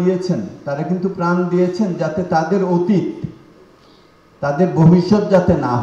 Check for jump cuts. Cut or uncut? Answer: uncut